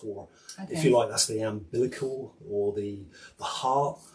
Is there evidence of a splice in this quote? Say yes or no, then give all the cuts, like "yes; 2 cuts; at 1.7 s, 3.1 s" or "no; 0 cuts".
no; 0 cuts